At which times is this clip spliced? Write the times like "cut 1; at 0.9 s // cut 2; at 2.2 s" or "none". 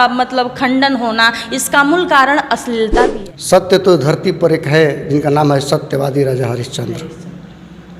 cut 1; at 3.2 s